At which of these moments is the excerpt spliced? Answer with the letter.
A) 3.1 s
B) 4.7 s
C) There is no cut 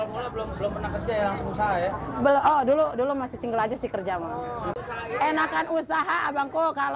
B